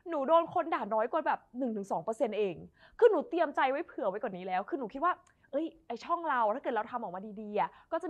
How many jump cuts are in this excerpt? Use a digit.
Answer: 0